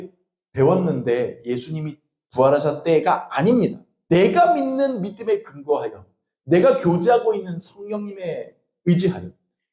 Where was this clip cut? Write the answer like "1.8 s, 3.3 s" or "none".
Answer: 3.9 s